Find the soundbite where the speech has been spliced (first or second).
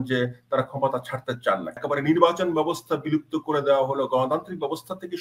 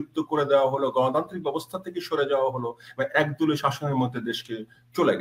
first